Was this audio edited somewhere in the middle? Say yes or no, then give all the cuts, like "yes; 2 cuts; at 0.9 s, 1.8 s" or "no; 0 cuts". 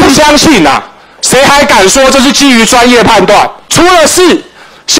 yes; 1 cut; at 3.6 s